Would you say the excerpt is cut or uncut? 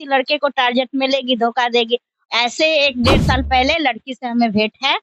cut